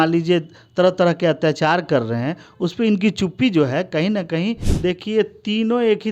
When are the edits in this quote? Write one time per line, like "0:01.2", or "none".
0:04.7